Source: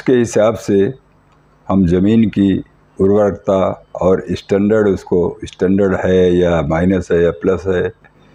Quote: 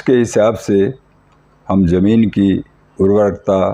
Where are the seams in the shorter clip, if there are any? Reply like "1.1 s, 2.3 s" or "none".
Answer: none